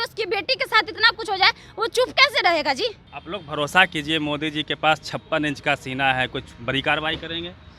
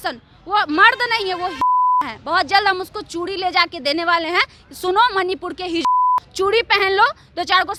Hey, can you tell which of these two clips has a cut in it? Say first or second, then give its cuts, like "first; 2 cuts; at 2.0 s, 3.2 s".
first; 1 cut; at 3.1 s